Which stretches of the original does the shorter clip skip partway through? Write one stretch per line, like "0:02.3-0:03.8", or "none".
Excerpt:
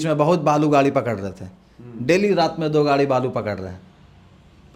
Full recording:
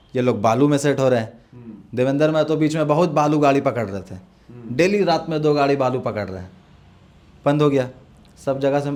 none